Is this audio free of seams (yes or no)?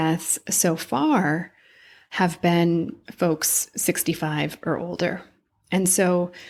yes